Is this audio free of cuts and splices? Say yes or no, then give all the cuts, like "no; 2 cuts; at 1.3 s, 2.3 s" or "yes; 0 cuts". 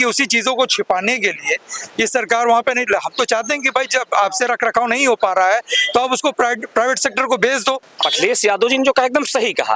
no; 1 cut; at 7.9 s